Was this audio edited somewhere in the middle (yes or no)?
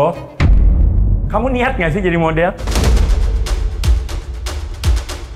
no